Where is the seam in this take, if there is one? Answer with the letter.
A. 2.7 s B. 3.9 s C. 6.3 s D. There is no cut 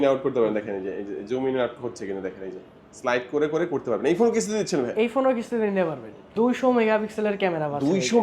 C